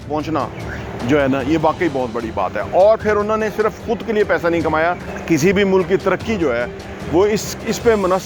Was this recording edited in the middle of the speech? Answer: yes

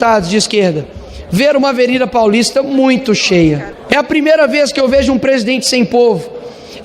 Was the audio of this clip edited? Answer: yes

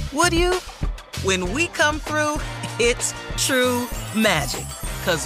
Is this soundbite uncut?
yes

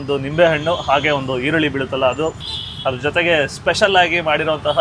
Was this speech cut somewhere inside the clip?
yes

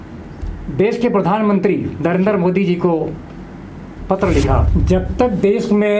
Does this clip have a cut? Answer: yes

